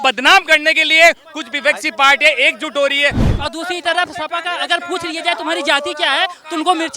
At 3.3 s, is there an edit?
yes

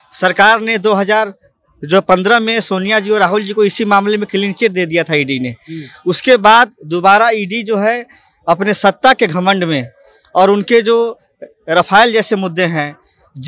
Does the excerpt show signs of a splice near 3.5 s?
no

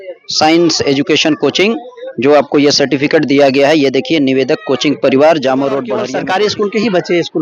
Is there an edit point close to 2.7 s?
no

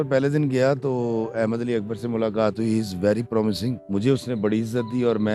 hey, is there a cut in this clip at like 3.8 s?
yes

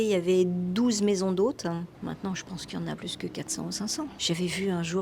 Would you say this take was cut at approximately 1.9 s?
yes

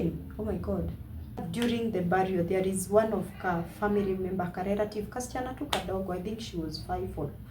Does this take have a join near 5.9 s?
no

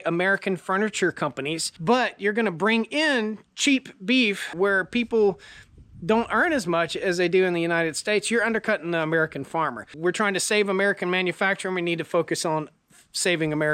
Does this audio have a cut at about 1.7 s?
yes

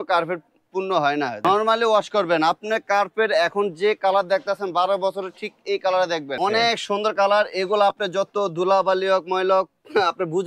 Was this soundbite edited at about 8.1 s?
no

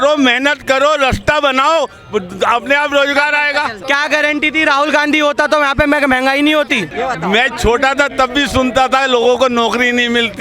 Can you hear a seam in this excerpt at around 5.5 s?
no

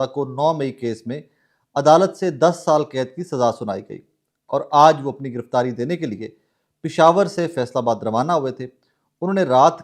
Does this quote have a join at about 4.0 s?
no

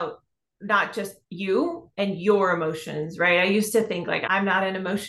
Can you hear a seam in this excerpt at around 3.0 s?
no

